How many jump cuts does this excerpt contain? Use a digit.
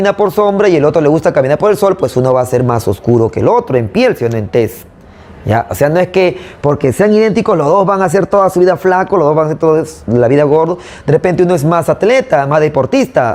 0